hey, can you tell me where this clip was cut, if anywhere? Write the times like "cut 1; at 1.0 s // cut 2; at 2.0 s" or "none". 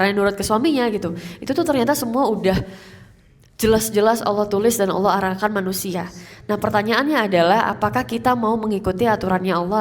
none